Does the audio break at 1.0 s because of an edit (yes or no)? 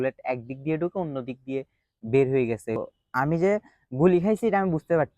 no